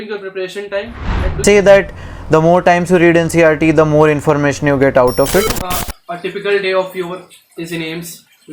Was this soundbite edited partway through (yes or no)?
yes